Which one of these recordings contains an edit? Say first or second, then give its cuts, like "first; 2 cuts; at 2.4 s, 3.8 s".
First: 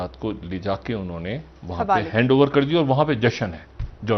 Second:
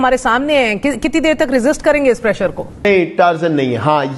second; 1 cut; at 2.8 s